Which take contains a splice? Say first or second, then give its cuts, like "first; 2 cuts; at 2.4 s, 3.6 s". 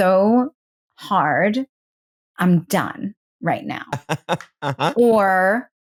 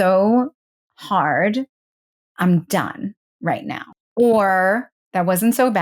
second; 1 cut; at 4.1 s